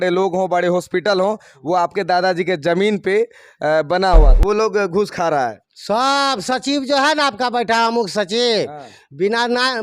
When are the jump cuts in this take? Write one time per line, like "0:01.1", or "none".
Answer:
0:04.3